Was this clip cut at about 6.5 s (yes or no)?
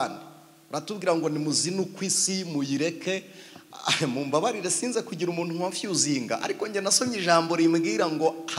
no